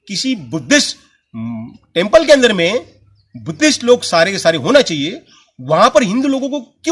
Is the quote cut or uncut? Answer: uncut